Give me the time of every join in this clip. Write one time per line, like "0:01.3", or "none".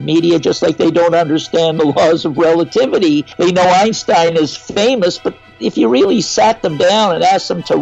0:03.3